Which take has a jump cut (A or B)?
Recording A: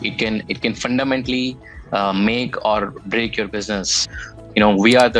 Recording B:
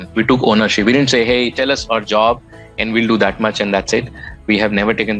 A